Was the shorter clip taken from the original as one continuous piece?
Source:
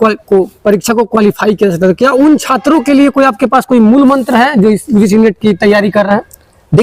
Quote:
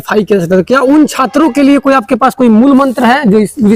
yes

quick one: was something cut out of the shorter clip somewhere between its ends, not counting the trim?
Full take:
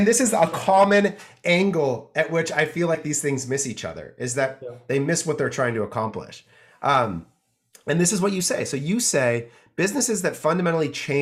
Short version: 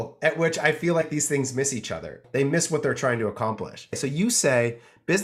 yes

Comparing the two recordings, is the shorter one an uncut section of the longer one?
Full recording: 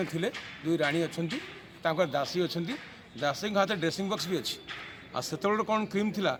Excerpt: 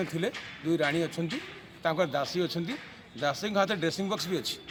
yes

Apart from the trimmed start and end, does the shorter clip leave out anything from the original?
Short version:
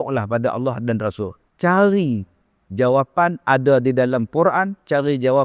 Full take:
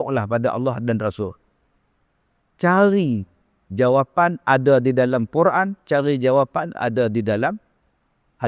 yes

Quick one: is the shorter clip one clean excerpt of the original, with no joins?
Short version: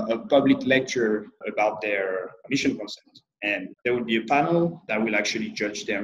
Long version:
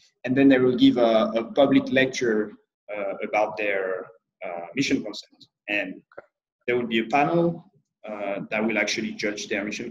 no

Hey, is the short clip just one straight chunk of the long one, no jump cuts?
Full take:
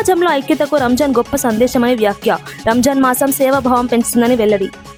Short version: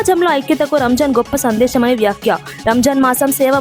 yes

